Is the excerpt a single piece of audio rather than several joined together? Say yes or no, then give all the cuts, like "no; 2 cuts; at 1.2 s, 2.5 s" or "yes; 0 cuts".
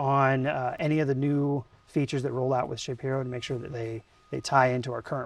yes; 0 cuts